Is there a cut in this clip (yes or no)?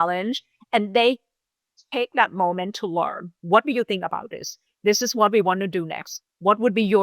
yes